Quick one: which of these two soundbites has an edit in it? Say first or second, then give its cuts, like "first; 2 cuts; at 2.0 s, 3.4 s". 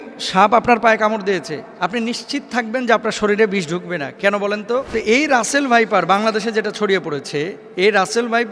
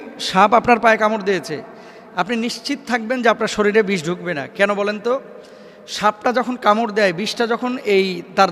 first; 3 cuts; at 1.6 s, 4.9 s, 7.6 s